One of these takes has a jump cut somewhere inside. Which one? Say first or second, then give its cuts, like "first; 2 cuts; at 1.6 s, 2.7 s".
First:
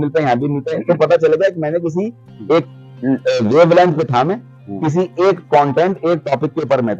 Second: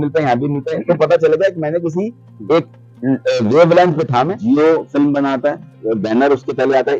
second; 1 cut; at 4.4 s